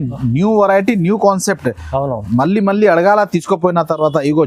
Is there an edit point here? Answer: no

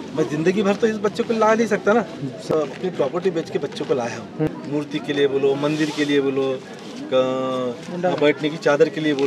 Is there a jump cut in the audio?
yes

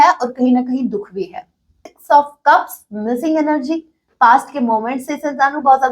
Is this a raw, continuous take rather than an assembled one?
no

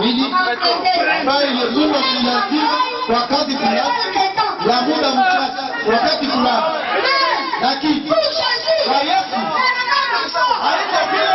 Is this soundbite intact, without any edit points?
yes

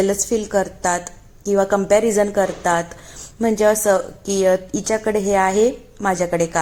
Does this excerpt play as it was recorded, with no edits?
yes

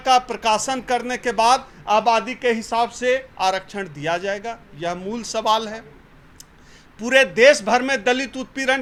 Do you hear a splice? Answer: no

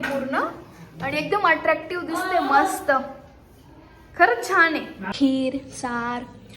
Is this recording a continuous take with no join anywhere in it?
no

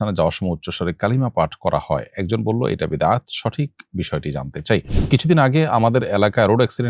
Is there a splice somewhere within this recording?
yes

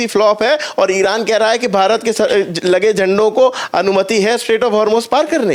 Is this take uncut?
yes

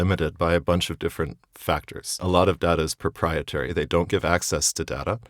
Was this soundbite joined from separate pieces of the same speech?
yes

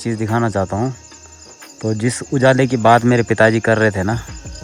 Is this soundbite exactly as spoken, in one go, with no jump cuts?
yes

